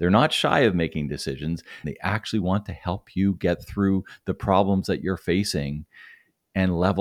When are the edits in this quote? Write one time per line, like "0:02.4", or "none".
0:01.8